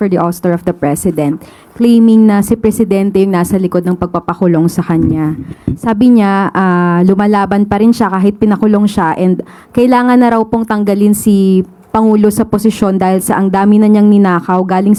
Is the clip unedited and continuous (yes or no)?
yes